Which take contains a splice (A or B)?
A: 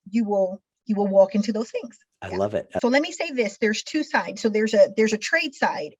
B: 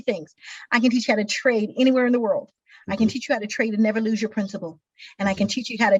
A